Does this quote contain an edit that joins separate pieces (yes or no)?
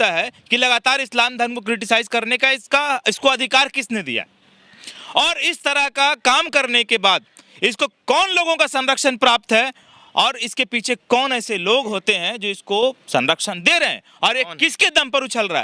no